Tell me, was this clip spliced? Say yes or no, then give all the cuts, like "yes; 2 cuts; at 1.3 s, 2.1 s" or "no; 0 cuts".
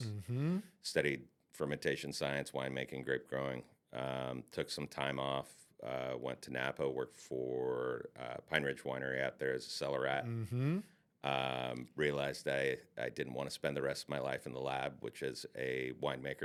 no; 0 cuts